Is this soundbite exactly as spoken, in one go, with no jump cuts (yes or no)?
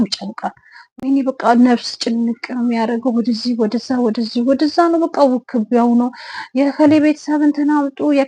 yes